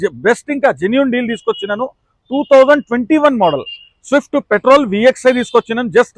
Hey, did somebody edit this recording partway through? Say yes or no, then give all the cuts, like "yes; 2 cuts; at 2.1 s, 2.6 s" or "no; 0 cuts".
no; 0 cuts